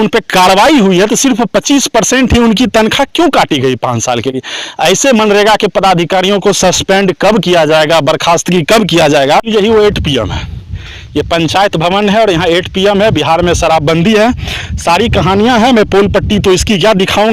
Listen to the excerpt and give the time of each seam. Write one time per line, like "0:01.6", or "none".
0:09.5